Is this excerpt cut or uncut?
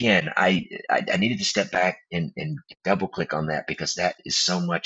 uncut